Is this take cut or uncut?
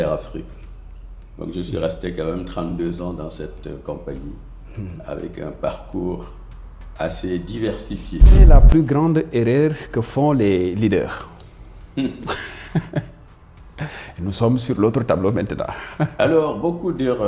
cut